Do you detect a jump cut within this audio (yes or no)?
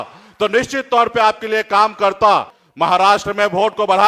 yes